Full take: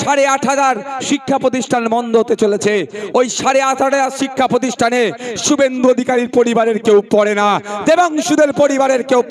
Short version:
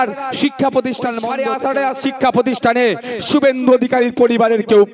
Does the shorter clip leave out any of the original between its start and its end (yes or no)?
yes